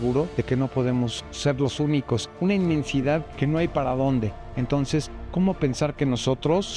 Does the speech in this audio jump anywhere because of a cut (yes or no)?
no